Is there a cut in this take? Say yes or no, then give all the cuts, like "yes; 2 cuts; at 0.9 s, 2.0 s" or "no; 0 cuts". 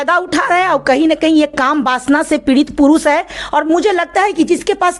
no; 0 cuts